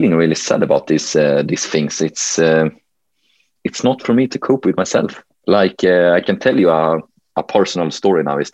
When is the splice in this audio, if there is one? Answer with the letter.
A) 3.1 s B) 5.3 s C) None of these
B